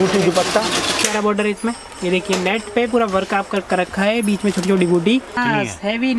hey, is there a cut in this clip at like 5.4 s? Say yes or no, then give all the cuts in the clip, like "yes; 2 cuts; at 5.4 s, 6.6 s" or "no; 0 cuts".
yes; 2 cuts; at 1.0 s, 5.4 s